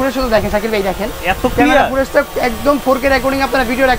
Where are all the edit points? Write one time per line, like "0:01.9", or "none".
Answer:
none